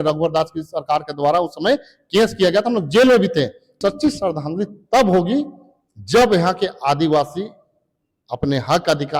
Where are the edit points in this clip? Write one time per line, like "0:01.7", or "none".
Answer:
0:03.8

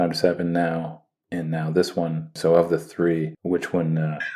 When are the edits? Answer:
0:02.3
0:03.4

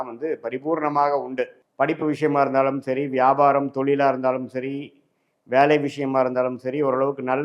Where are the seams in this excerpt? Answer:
0:01.6

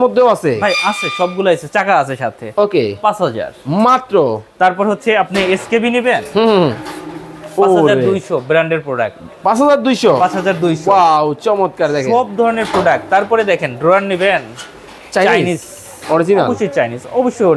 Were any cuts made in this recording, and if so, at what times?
none

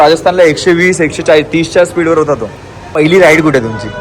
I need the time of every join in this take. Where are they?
0:02.9

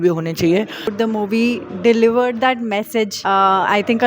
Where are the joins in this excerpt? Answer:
0:00.9
0:03.2

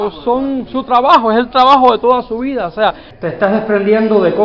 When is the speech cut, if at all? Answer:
0:03.1

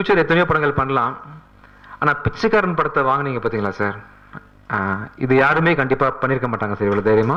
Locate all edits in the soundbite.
none

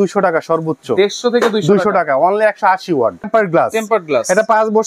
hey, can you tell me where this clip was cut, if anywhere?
0:03.3

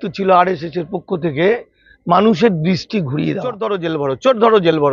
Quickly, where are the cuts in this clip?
0:03.7

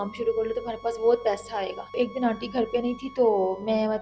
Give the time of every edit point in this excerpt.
0:01.9

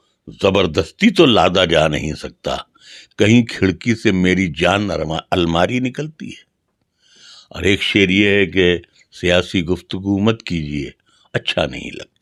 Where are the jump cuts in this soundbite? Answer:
none

